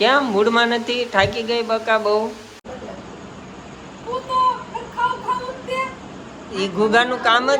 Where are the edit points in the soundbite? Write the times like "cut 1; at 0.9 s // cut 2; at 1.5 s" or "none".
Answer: cut 1; at 2.6 s